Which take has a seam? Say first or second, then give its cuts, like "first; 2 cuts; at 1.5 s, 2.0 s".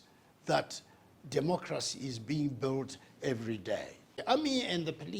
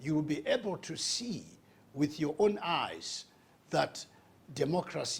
first; 1 cut; at 4.2 s